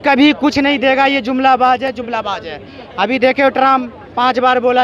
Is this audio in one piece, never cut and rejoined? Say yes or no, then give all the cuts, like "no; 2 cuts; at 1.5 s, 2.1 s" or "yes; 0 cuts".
yes; 0 cuts